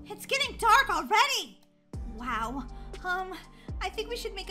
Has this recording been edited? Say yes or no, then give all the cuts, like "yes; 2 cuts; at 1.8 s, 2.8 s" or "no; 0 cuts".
no; 0 cuts